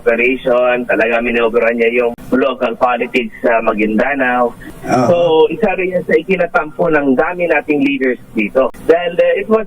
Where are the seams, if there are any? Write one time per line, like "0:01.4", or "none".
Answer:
0:02.2
0:04.7
0:08.8